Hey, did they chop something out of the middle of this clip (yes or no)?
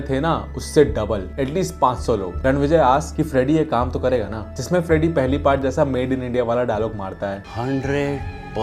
yes